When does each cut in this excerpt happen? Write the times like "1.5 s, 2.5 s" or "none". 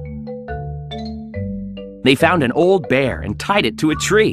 1.2 s